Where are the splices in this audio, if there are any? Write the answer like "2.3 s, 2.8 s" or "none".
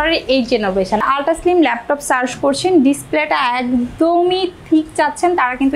1.0 s